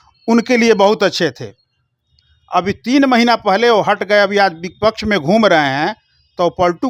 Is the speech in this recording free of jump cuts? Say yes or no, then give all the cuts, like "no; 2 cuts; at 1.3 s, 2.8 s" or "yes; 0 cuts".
yes; 0 cuts